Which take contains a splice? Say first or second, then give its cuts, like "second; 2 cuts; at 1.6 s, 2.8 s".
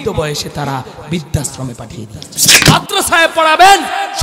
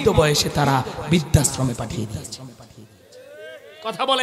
first; 1 cut; at 2.6 s